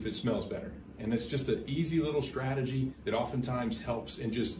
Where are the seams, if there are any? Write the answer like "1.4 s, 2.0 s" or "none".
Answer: 3.0 s